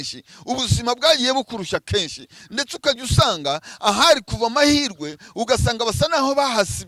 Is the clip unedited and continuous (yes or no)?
yes